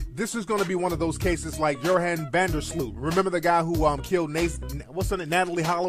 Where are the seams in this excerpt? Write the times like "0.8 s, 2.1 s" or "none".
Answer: none